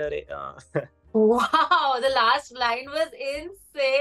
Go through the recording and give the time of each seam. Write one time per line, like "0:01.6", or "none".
0:01.0